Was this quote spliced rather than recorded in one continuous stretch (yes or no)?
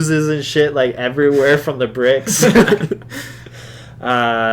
no